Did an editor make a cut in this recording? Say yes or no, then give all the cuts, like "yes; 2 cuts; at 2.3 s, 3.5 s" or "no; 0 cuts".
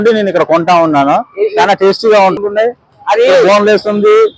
yes; 1 cut; at 2.4 s